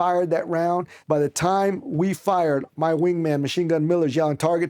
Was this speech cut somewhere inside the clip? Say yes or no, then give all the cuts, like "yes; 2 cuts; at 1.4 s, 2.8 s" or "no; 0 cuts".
yes; 1 cut; at 0.9 s